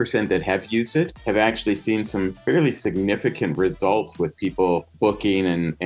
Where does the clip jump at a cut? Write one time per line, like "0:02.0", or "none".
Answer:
0:01.2
0:04.9